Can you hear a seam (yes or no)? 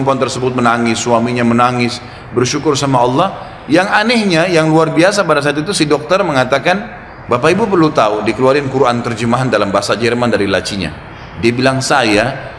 no